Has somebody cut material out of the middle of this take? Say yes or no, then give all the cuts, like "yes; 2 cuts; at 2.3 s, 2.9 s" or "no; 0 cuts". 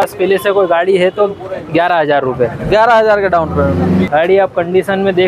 yes; 1 cut; at 4.1 s